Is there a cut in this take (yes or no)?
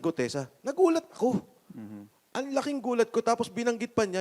no